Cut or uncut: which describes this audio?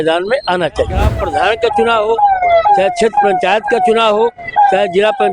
cut